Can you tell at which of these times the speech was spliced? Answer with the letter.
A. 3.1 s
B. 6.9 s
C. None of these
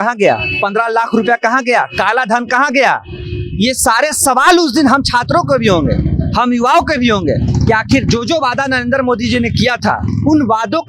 C